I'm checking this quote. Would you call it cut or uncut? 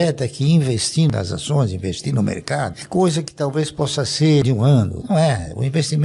cut